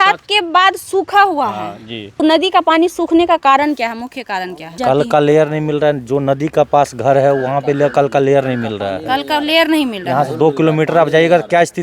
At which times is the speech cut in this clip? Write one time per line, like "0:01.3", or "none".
0:02.1
0:04.8